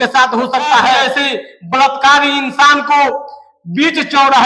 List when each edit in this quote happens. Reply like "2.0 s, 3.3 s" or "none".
1.0 s